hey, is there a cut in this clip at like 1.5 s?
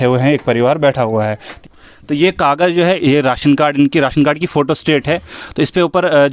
yes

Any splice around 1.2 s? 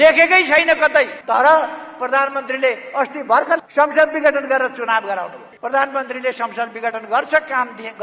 yes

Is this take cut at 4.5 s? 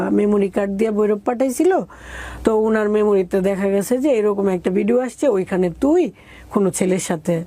no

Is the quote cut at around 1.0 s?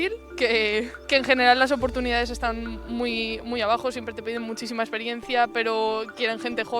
yes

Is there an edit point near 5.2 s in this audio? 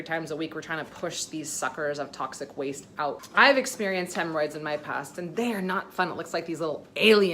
no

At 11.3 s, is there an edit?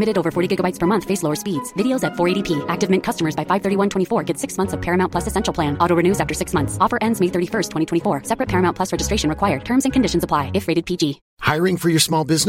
no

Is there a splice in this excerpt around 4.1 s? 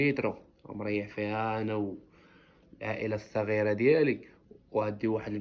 no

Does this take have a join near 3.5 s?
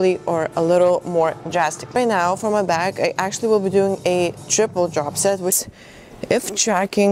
no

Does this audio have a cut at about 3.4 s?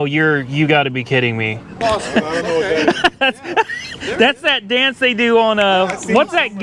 no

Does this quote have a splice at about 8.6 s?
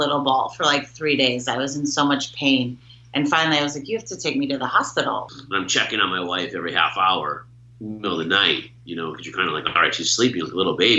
no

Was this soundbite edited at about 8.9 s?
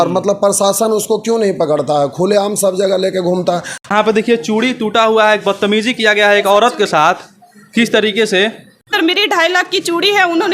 yes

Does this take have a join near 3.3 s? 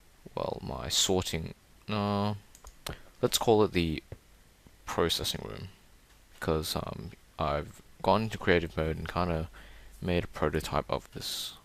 yes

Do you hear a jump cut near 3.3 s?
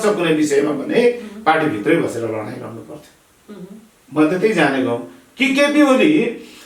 no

